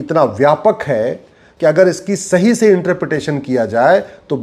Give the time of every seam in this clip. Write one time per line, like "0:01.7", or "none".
none